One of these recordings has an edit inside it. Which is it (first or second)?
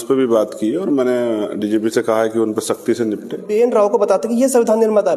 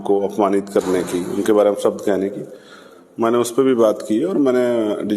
first